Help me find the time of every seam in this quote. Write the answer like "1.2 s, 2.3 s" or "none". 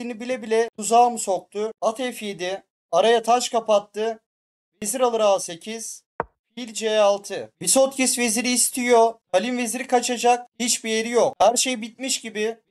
1.7 s

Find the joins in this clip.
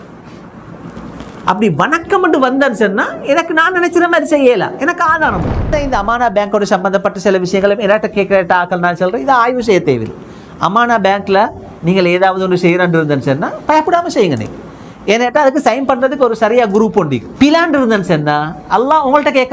5.7 s, 17.3 s

